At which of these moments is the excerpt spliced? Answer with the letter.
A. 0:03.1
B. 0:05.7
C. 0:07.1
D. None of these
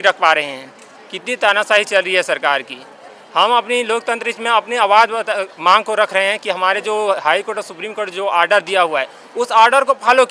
D